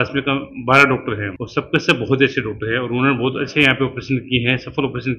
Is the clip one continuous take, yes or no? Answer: yes